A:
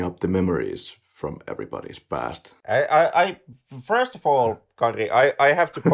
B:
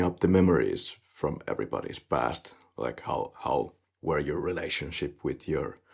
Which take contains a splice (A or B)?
A